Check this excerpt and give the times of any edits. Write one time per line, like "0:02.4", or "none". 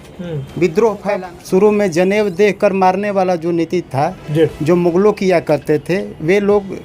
0:01.2